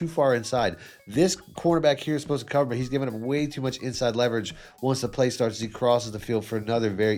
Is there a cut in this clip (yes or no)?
no